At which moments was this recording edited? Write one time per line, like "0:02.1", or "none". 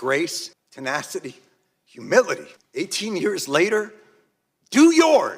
0:02.6